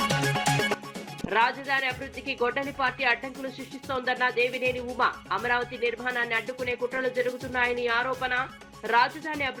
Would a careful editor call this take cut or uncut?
cut